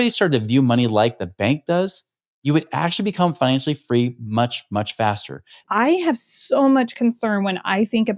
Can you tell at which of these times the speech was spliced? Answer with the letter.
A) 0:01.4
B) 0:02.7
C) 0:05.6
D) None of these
C